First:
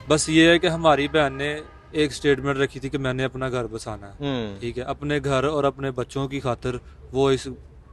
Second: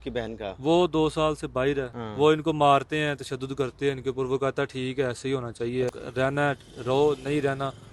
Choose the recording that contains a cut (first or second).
second